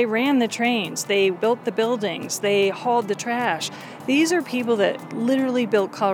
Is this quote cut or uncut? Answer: cut